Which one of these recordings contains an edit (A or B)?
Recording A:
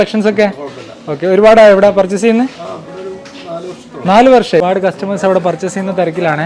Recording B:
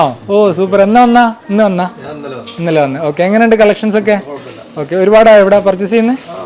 A